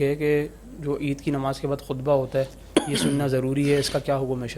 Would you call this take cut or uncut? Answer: uncut